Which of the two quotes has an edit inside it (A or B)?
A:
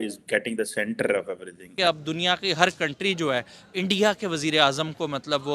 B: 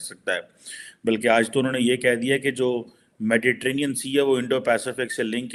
A